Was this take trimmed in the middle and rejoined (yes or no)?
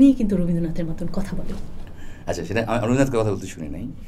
no